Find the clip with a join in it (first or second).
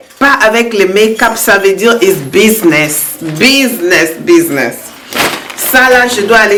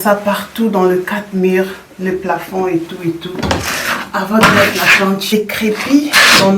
second